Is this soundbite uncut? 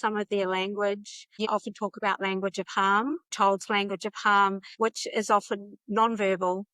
no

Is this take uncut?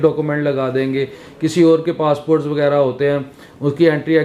yes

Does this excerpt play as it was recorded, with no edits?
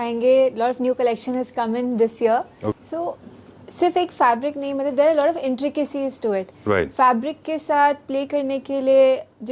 no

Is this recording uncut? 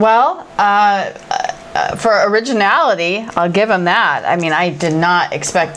yes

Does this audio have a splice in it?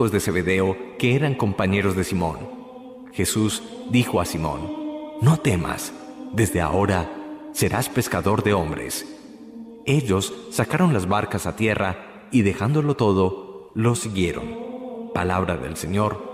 yes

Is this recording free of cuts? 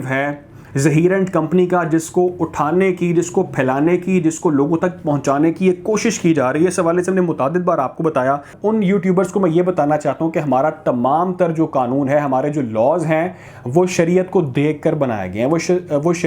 no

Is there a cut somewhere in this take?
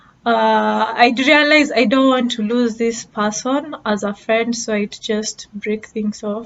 no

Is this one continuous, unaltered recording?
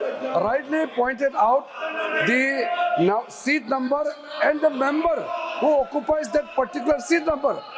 yes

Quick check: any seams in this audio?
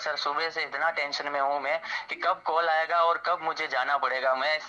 no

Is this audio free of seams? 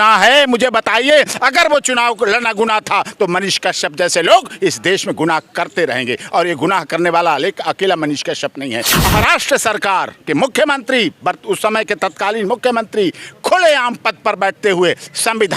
no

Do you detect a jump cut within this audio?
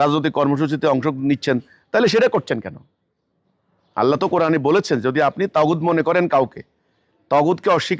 no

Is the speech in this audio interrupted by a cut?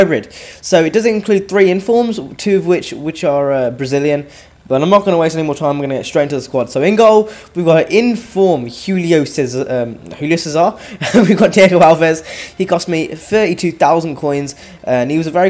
no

